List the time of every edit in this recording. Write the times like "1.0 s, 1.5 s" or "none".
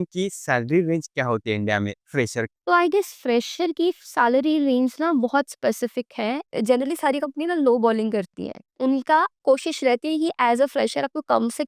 none

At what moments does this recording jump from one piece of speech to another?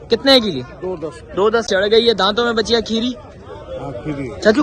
1.7 s

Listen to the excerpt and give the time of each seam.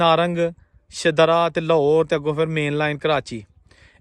none

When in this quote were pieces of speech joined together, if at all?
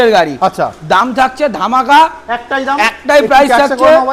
none

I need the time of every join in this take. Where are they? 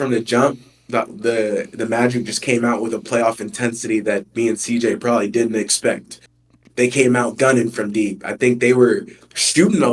none

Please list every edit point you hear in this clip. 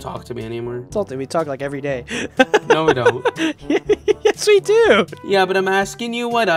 0.8 s, 3.5 s, 5.2 s

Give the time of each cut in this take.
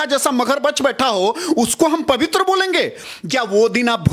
3.2 s

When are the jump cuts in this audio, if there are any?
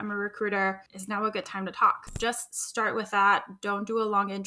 0.9 s, 2.1 s

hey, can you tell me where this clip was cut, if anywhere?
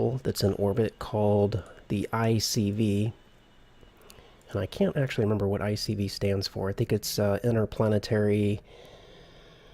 2.1 s

